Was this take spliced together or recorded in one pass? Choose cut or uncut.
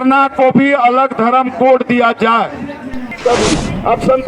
cut